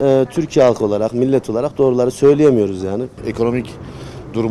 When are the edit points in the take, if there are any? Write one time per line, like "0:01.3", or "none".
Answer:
0:03.2